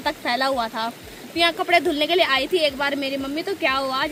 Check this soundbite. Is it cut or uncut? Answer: uncut